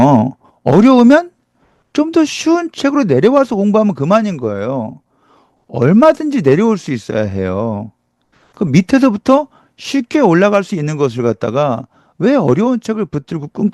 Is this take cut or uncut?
uncut